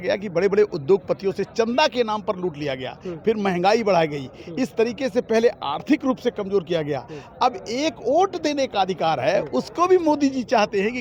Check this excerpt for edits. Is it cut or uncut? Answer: uncut